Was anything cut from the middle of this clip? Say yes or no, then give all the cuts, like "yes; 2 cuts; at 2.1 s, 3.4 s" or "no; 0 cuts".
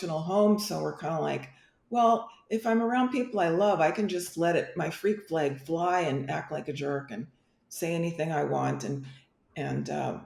no; 0 cuts